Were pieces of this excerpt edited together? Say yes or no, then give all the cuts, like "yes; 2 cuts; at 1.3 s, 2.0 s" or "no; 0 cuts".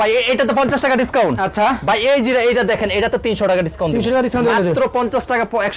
no; 0 cuts